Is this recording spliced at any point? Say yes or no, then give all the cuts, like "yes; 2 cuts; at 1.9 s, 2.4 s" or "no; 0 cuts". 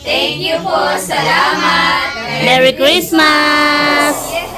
no; 0 cuts